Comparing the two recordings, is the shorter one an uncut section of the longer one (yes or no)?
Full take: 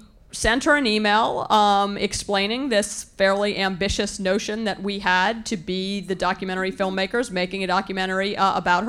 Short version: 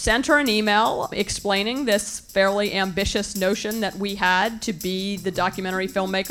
no